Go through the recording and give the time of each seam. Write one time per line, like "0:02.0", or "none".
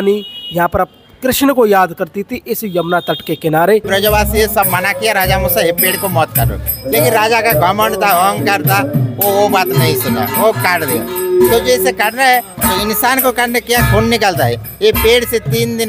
0:03.9